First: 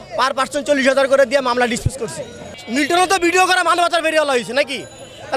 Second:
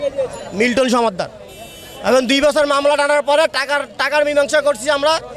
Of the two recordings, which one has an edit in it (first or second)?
first